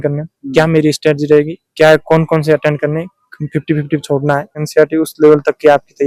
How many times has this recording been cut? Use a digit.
1